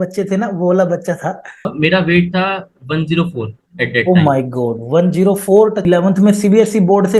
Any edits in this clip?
yes; 2 cuts; at 1.7 s, 5.8 s

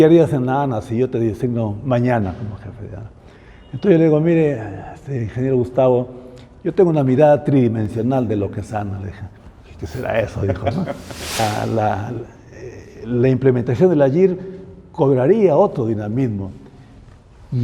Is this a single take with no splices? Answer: no; 1 cut; at 11.4 s

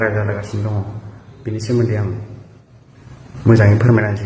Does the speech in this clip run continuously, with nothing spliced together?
yes; 0 cuts

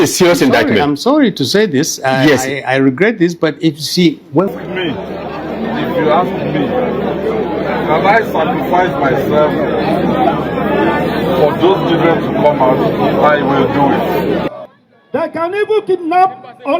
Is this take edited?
yes; 2 cuts; at 4.5 s, 14.5 s

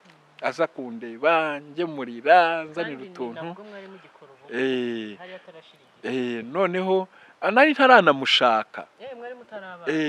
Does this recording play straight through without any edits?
yes; 0 cuts

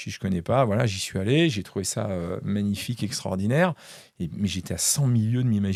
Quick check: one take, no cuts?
yes; 0 cuts

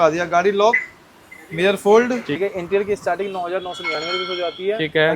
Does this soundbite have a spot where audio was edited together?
yes; 1 cut; at 2.4 s

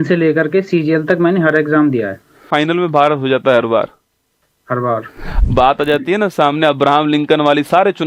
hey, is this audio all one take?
no; 2 cuts; at 2.5 s, 5.3 s

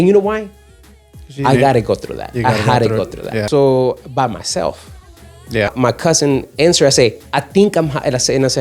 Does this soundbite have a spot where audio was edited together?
yes; 2 cuts; at 3.4 s, 5.7 s

